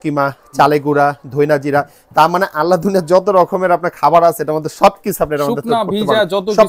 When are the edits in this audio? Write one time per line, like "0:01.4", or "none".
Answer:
none